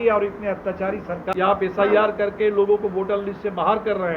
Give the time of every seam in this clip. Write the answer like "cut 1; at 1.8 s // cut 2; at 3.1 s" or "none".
cut 1; at 1.2 s